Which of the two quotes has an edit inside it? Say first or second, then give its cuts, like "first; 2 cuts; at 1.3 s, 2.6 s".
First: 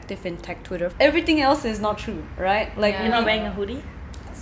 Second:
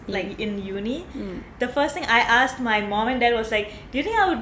first; 1 cut; at 0.9 s